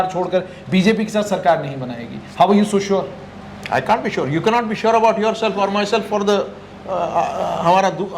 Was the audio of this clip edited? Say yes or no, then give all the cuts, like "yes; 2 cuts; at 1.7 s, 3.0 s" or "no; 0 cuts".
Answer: no; 0 cuts